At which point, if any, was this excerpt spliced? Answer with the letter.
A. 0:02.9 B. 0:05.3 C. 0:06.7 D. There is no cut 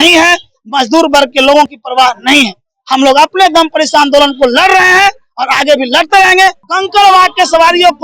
C